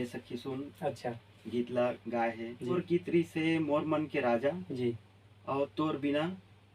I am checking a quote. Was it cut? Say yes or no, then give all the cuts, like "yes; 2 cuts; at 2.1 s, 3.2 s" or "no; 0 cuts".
yes; 1 cut; at 2.7 s